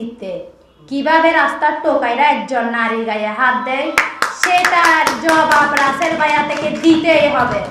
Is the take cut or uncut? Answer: uncut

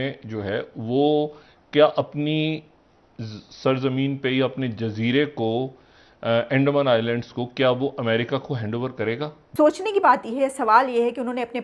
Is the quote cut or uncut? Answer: cut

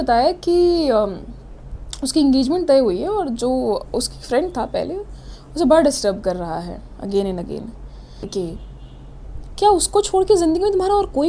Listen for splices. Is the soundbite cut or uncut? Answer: cut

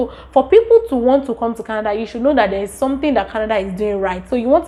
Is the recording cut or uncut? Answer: uncut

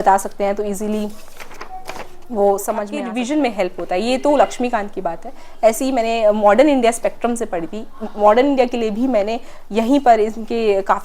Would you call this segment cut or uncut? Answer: cut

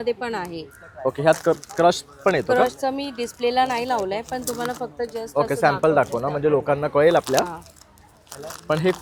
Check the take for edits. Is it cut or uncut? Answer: uncut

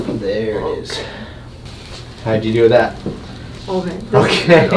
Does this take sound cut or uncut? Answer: uncut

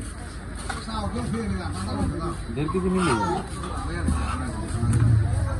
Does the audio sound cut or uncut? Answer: uncut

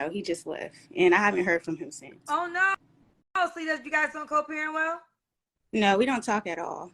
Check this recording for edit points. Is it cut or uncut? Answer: cut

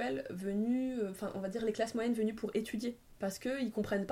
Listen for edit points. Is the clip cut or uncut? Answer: cut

